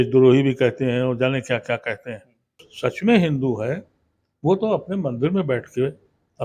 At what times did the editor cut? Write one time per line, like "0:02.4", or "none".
0:02.7